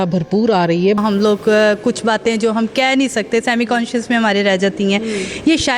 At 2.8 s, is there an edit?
no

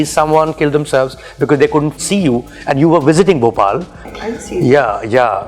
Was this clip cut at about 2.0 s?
yes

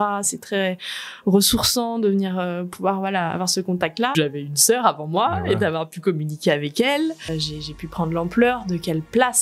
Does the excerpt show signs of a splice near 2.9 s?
no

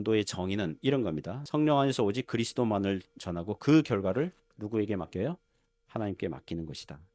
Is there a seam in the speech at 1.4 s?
yes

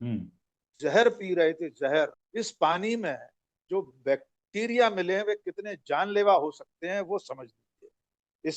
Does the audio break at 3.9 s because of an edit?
no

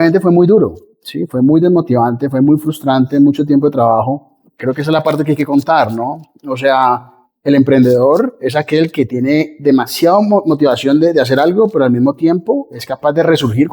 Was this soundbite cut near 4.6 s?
yes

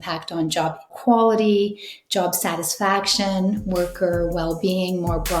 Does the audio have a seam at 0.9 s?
yes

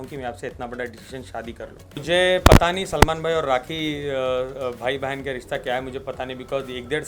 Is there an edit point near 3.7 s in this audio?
no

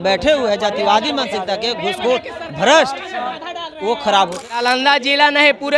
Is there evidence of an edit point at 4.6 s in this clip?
yes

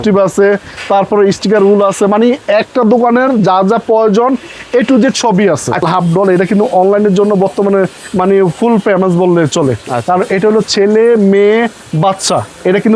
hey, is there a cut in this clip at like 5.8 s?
yes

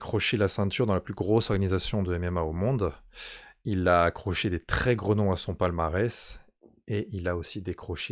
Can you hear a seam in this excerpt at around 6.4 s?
no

